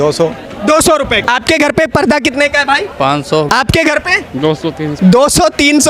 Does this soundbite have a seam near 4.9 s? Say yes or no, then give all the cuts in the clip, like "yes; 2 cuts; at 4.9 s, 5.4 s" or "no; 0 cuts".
yes; 3 cuts; at 1.2 s, 3.5 s, 4.9 s